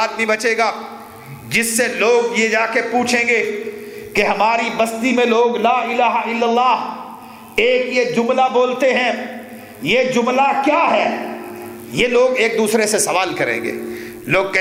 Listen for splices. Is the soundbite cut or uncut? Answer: uncut